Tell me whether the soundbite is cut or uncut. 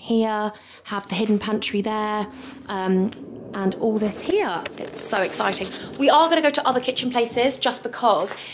uncut